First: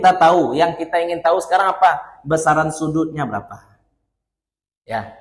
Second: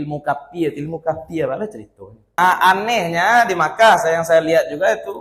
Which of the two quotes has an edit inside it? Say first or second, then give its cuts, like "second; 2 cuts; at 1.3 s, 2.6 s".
second; 1 cut; at 2.3 s